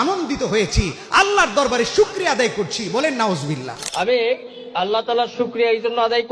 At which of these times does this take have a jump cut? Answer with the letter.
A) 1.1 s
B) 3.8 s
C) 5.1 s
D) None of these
B